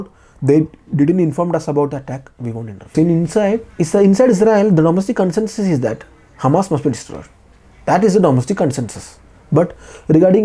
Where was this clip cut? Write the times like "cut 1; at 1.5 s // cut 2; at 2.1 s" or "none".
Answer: cut 1; at 2.9 s